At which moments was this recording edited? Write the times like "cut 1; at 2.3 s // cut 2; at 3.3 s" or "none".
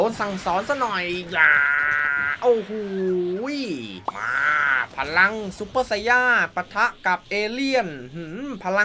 cut 1; at 3.9 s // cut 2; at 7.3 s